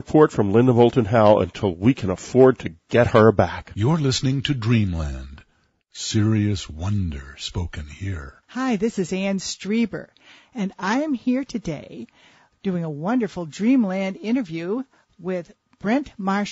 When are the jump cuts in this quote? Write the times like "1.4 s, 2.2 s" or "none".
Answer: 2.4 s